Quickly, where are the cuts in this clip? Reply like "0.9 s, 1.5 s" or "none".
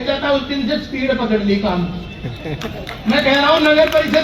none